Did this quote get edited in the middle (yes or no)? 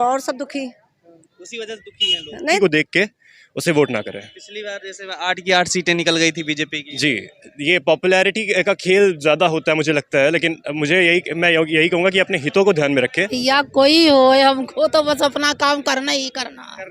yes